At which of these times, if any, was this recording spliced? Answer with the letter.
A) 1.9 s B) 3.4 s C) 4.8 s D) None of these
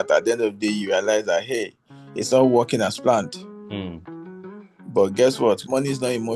D